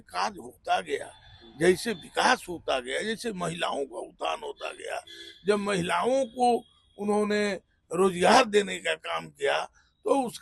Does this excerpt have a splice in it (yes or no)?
no